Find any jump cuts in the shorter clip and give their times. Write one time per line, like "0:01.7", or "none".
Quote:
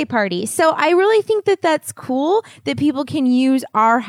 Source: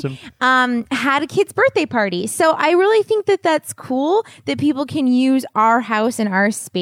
none